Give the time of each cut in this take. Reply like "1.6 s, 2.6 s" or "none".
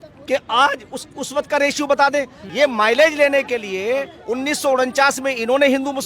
2.4 s

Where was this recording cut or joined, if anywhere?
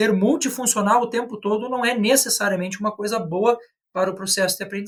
none

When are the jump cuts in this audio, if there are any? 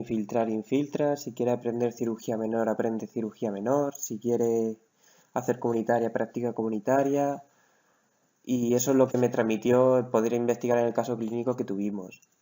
5.1 s

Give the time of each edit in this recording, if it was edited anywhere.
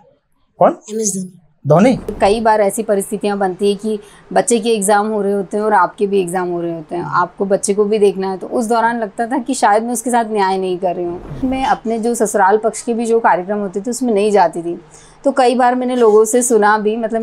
2.1 s, 11.4 s

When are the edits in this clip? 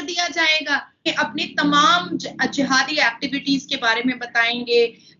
1.1 s

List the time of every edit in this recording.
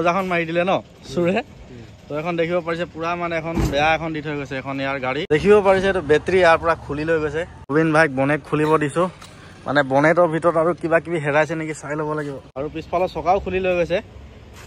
5.3 s, 7.6 s, 12.4 s

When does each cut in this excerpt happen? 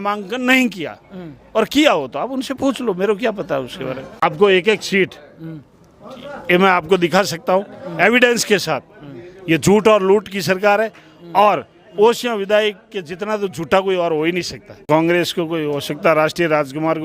4.2 s, 14.8 s

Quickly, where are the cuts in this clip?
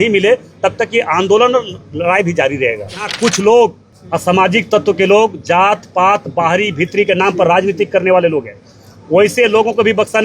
3.1 s, 3.9 s

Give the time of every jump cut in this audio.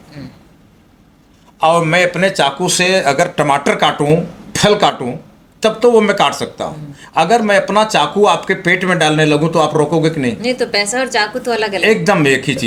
none

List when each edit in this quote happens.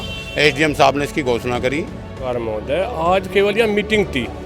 2.1 s

